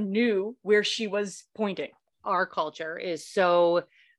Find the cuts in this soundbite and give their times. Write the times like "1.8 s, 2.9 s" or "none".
2.2 s